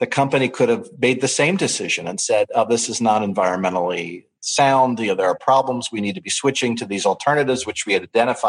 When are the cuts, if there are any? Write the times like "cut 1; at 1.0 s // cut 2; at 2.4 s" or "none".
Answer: none